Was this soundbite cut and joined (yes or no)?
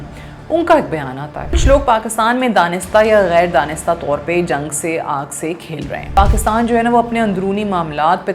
yes